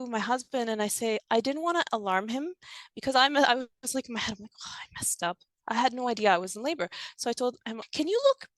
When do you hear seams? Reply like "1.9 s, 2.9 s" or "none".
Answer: 1.2 s, 7.7 s

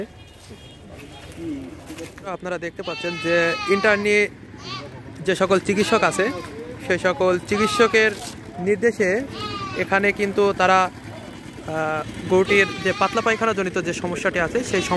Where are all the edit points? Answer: 2.2 s

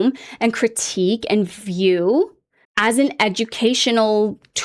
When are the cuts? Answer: none

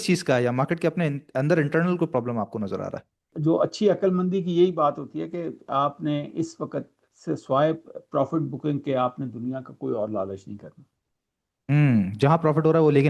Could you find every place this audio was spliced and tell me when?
3.1 s

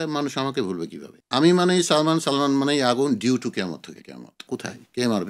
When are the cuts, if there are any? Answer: 4.4 s

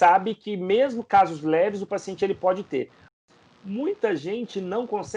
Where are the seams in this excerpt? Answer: 3.2 s

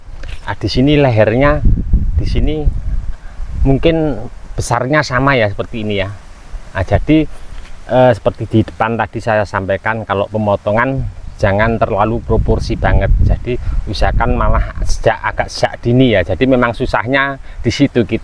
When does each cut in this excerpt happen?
none

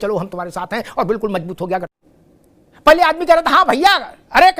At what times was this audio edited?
2.0 s

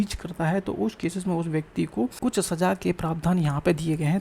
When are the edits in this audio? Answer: 2.1 s

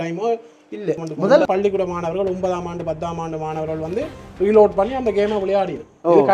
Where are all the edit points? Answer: 1.5 s

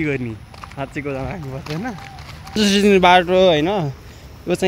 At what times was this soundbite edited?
2.6 s

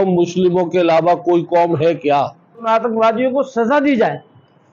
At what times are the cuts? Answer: 2.6 s

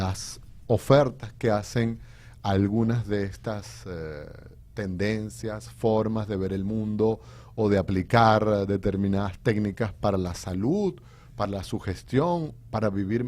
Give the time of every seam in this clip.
2.7 s

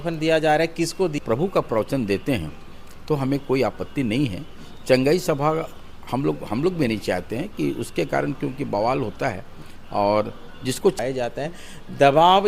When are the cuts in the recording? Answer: 1.1 s, 11.0 s

